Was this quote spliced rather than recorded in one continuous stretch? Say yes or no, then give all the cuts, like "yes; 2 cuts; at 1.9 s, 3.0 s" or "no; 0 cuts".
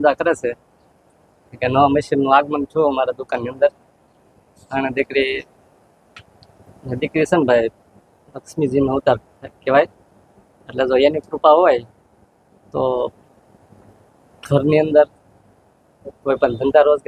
no; 0 cuts